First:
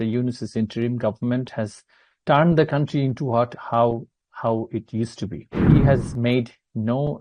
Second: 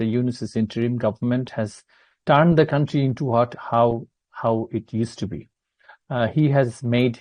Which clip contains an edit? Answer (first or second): first